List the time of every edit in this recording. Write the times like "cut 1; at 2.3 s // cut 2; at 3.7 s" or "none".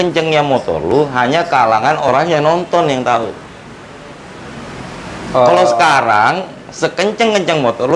none